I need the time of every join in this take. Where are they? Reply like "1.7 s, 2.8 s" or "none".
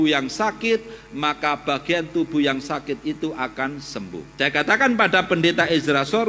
4.3 s